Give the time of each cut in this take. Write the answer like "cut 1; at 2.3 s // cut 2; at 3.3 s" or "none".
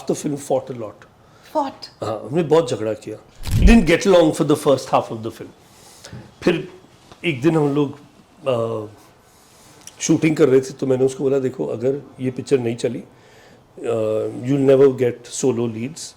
cut 1; at 3.6 s